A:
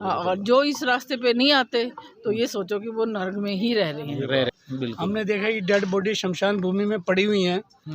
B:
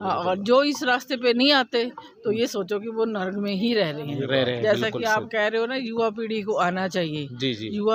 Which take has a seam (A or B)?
A